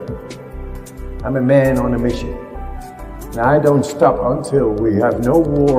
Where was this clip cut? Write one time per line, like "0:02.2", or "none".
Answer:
none